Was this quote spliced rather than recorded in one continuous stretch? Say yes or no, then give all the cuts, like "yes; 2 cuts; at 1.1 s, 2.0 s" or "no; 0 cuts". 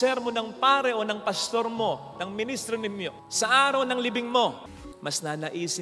yes; 1 cut; at 4.8 s